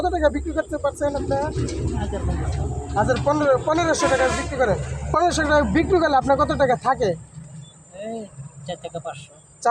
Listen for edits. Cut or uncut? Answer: uncut